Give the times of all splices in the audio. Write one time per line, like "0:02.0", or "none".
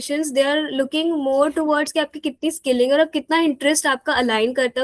none